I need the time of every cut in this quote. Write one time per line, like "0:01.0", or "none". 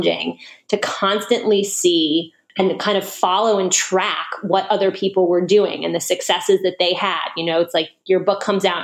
0:02.4